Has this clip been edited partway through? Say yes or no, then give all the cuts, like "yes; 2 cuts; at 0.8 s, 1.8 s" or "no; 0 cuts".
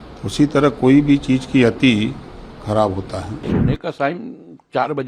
yes; 1 cut; at 3.4 s